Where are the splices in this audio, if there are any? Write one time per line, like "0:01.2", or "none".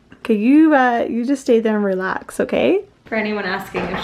0:03.0